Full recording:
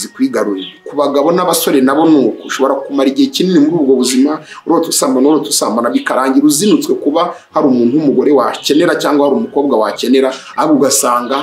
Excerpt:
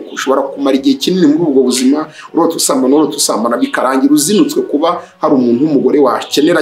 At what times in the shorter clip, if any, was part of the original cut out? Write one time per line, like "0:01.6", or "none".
none